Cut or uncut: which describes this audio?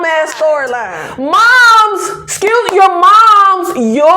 cut